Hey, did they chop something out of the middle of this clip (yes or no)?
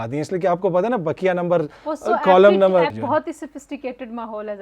yes